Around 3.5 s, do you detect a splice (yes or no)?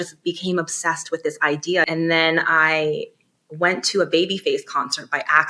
no